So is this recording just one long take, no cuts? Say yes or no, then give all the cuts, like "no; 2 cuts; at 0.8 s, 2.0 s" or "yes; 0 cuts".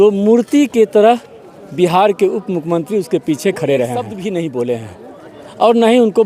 no; 1 cut; at 4.1 s